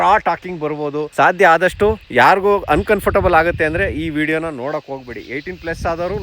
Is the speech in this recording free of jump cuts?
no; 1 cut; at 1.1 s

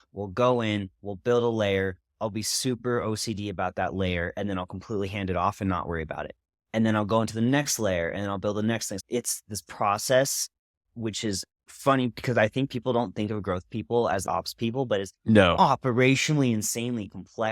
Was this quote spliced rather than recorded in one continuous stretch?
yes; 2 cuts; at 8.9 s, 14.2 s

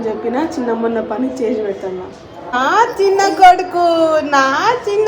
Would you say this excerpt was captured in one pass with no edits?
no; 1 cut; at 2.5 s

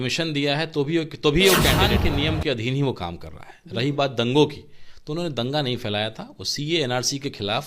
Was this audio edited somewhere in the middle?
yes; 1 cut; at 1.9 s

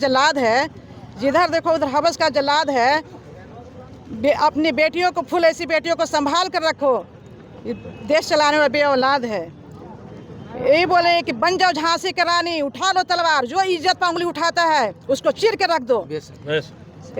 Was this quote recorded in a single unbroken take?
yes; 0 cuts

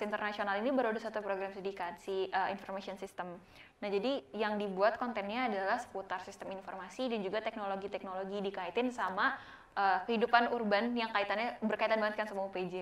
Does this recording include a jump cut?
no; 0 cuts

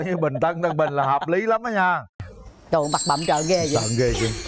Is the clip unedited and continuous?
no; 1 cut; at 2.2 s

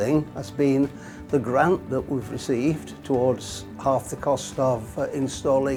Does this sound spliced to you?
no; 0 cuts

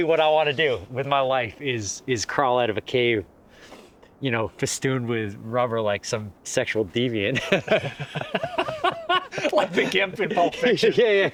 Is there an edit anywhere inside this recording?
no; 0 cuts

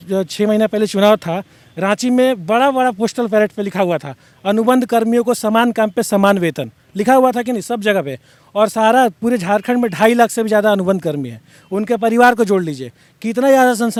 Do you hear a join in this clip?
no; 0 cuts

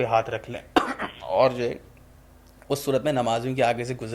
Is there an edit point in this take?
no; 0 cuts

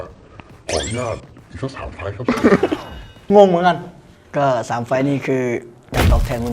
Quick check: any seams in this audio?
yes; 1 cut; at 3.2 s

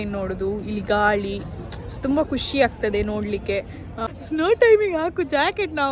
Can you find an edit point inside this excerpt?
yes; 1 cut; at 4.0 s

